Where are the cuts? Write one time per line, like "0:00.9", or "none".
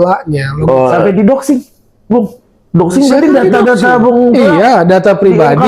0:01.0